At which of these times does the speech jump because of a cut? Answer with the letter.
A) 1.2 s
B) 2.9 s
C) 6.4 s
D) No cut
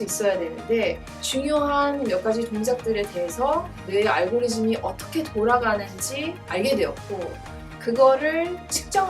A